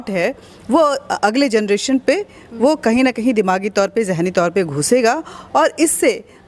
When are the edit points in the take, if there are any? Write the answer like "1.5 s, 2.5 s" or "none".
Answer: none